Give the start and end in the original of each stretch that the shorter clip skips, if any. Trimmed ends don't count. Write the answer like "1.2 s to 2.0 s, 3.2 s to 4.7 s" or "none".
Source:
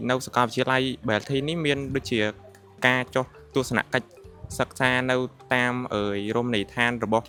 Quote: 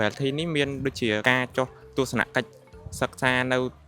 2.3 s to 2.8 s